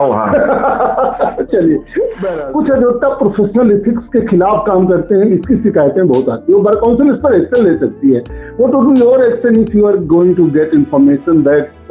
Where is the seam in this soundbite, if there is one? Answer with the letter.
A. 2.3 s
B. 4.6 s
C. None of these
A